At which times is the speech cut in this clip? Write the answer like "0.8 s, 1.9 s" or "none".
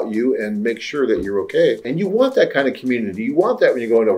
1.9 s